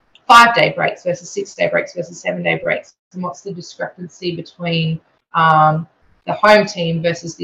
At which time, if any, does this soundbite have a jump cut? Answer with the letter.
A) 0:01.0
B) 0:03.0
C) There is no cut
C